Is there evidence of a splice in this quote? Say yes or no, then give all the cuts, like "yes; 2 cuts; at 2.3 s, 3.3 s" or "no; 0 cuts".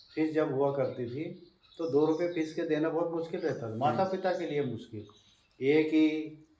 no; 0 cuts